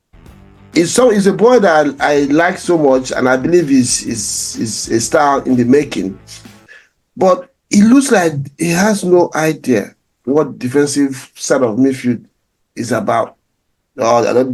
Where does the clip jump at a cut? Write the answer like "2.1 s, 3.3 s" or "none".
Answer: none